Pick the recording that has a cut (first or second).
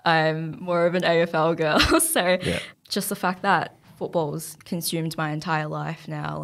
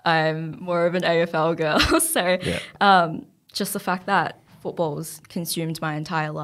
first